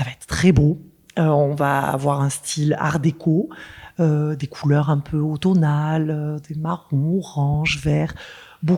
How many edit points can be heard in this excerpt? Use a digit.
0